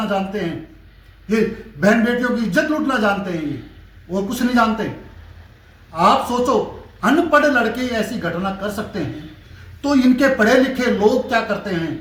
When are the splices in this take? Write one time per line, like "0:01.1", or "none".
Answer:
none

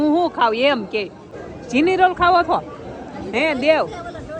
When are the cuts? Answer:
0:01.3

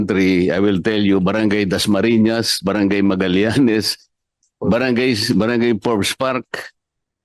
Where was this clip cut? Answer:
none

